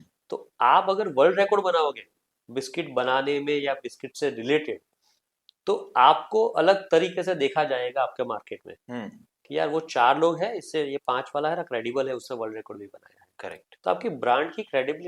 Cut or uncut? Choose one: uncut